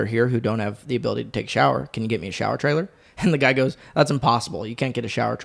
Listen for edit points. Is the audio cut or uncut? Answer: uncut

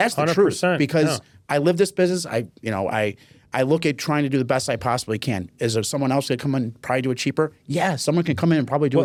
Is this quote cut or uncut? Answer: uncut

